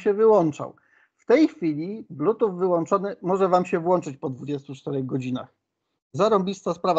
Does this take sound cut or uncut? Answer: uncut